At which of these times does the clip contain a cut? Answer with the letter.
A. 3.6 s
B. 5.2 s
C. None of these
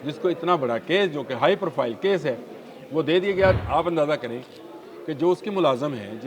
A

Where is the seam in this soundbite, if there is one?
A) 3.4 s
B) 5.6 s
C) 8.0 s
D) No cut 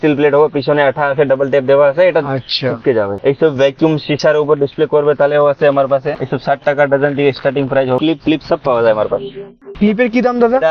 C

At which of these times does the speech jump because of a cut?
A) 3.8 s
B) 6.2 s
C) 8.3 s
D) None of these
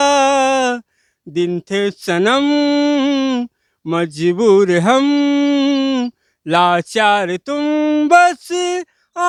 D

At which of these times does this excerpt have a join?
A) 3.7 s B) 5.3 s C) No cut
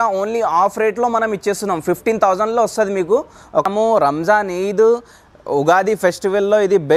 A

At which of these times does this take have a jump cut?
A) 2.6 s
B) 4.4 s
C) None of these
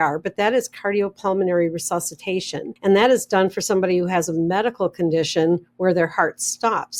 A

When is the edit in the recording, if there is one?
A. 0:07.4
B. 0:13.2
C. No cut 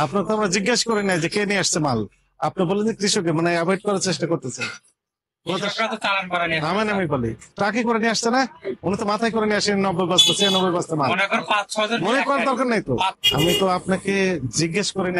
B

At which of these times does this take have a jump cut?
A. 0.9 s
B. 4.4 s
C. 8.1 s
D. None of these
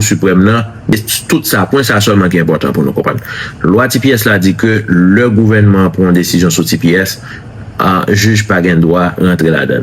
A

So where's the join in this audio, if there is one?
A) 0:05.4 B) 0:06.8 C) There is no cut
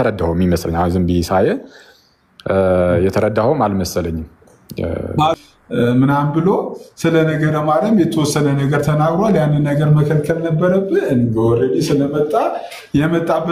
A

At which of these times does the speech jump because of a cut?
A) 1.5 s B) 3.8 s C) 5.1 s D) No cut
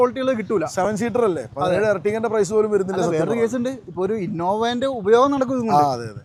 D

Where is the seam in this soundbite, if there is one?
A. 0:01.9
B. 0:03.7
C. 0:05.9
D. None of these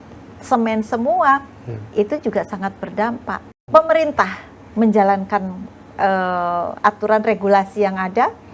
B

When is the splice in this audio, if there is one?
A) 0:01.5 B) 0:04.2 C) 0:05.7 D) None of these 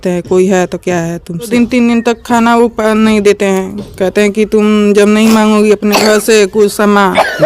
A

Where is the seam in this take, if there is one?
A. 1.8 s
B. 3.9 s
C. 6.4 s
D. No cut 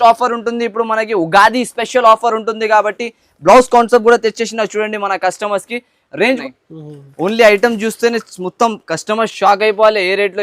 C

